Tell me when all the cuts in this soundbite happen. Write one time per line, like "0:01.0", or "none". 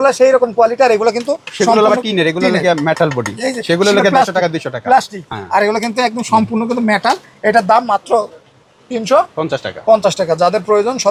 none